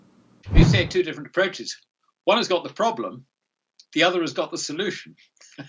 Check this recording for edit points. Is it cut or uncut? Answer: uncut